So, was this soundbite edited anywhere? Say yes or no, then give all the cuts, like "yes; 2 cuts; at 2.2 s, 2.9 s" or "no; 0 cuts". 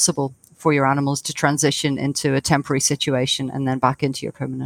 no; 0 cuts